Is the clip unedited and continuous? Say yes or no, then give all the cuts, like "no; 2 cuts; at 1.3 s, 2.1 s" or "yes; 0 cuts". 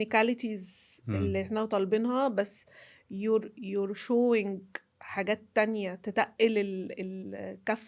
yes; 0 cuts